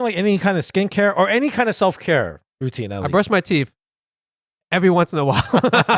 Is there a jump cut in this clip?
no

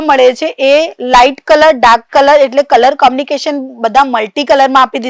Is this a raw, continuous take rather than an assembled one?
yes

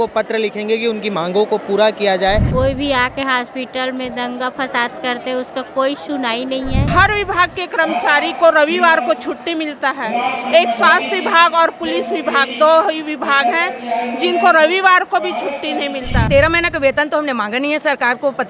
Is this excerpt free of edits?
no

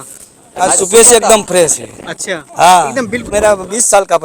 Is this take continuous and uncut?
no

